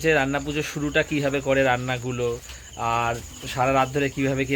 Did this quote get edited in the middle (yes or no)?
no